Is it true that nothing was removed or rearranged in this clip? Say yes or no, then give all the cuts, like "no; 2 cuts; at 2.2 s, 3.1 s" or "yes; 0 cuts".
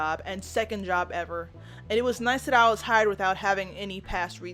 yes; 0 cuts